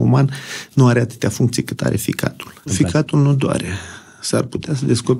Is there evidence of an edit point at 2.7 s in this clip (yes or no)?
yes